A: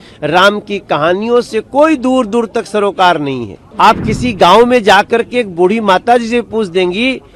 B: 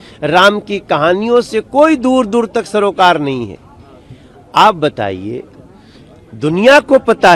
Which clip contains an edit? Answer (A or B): A